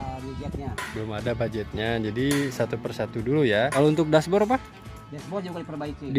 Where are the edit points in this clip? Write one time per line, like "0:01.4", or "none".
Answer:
0:03.7